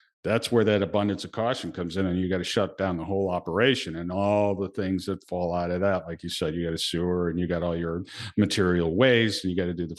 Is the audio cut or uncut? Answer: uncut